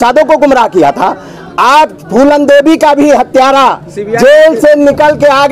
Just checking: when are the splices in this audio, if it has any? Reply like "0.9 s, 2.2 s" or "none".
none